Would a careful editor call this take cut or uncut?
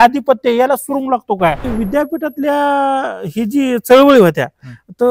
cut